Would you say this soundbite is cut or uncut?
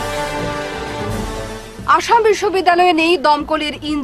cut